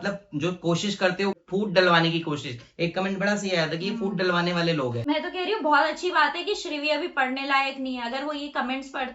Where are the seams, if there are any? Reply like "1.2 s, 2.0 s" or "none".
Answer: 1.4 s, 5.0 s

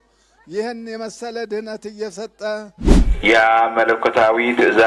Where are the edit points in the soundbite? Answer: 3.0 s

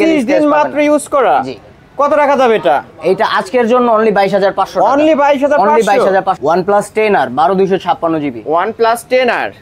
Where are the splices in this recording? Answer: 6.4 s

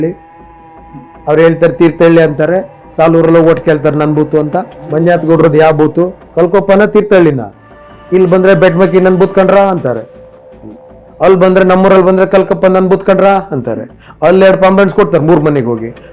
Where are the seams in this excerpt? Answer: 4.9 s, 6.2 s

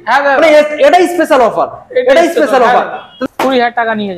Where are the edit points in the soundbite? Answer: 3.1 s

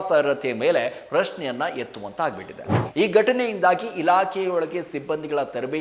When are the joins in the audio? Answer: 2.8 s

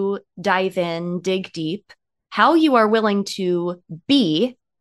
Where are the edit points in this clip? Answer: none

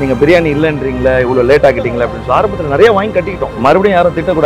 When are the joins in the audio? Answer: 3.6 s

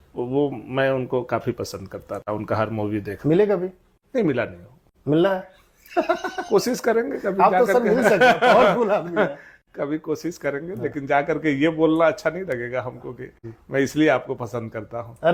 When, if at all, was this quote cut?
none

